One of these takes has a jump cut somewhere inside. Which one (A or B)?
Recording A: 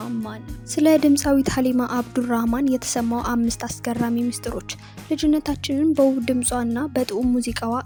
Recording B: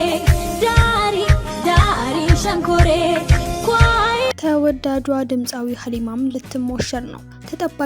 B